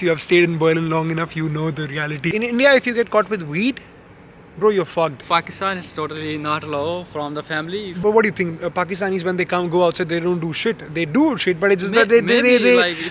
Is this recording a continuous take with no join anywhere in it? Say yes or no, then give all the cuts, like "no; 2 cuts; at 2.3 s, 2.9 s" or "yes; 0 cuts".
no; 3 cuts; at 2.3 s, 5.2 s, 7.8 s